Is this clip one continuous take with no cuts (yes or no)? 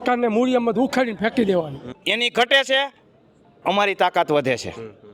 no